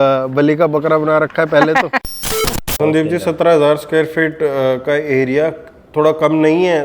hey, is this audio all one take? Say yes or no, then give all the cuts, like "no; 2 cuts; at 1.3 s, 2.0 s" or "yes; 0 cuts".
no; 1 cut; at 2.2 s